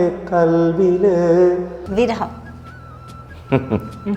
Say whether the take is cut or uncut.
cut